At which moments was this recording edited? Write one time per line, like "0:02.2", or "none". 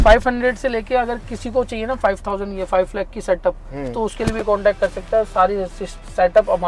none